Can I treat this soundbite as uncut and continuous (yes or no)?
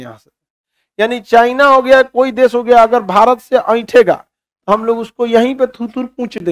yes